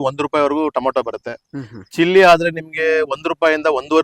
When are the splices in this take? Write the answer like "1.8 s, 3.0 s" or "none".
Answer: none